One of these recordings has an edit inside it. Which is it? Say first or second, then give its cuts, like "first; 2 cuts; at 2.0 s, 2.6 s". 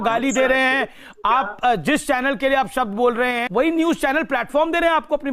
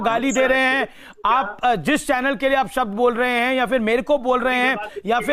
first; 1 cut; at 3.4 s